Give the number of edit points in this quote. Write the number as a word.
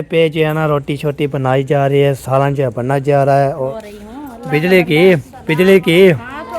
one